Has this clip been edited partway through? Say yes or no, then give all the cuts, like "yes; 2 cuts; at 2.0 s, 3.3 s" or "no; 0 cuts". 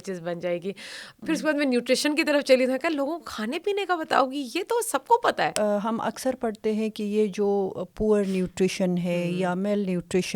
yes; 2 cuts; at 1.1 s, 5.5 s